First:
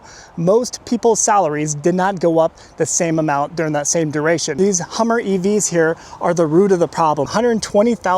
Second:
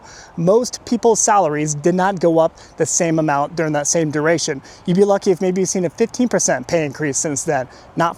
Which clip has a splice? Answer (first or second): first